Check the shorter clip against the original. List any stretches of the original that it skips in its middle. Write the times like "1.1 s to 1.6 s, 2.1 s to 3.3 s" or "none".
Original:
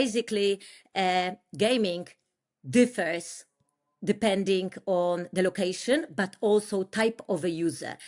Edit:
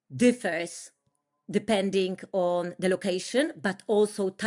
none